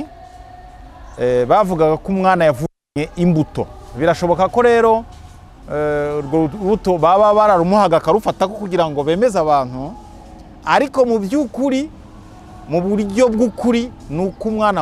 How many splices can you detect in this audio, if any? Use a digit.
1